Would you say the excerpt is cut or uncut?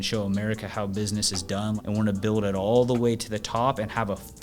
cut